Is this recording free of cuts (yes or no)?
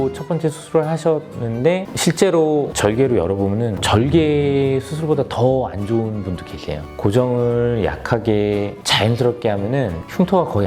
no